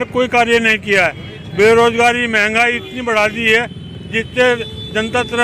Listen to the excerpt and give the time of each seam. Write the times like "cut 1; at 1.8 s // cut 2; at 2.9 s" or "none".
none